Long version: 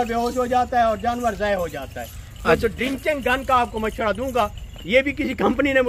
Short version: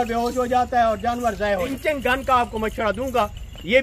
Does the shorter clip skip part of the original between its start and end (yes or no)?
yes